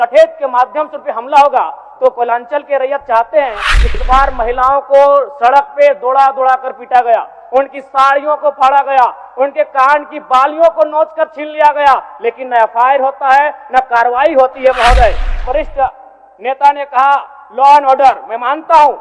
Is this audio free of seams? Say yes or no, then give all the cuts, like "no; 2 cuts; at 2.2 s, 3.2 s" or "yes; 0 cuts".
no; 2 cuts; at 3.8 s, 15.4 s